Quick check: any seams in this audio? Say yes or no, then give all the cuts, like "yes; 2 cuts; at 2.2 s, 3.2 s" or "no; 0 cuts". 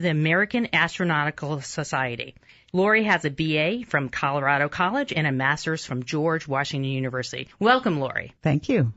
yes; 1 cut; at 7.3 s